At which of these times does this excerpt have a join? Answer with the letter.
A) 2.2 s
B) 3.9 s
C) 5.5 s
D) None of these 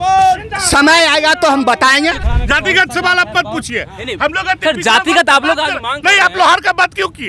A